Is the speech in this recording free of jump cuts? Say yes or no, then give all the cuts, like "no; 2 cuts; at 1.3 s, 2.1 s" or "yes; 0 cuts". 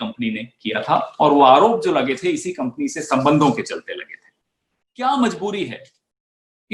no; 1 cut; at 4.8 s